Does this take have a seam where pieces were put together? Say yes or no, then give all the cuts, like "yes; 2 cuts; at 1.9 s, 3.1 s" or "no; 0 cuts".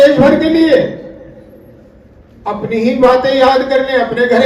no; 0 cuts